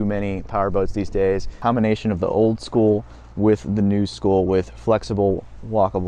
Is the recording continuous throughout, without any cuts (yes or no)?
no